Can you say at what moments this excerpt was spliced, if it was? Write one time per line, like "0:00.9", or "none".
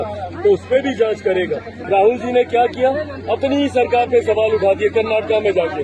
0:01.7